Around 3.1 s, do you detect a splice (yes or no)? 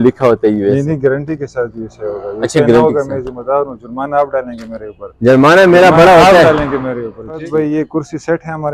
no